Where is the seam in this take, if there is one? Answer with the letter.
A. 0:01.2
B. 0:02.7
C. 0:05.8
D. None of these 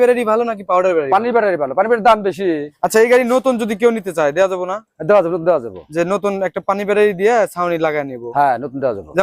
B